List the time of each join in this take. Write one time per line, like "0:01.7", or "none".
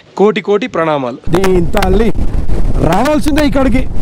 0:01.2